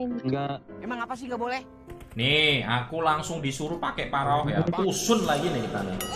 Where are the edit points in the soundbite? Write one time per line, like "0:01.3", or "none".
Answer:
0:01.8

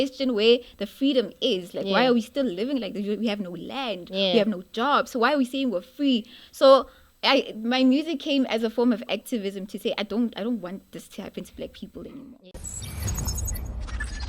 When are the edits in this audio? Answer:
0:12.2

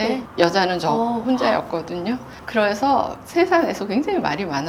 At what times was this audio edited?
0:02.4

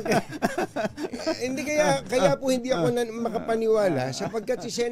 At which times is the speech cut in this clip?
0:03.1

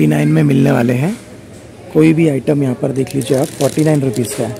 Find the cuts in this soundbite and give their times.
none

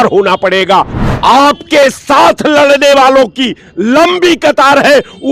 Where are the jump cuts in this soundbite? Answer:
0:01.0

